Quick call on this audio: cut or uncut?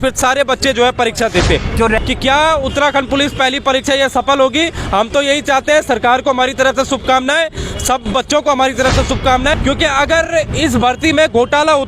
cut